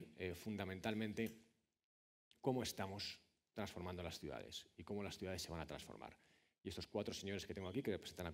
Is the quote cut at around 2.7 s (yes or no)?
yes